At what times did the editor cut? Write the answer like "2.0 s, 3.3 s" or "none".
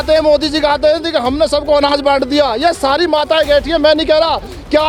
none